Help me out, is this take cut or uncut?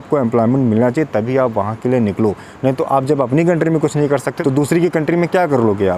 cut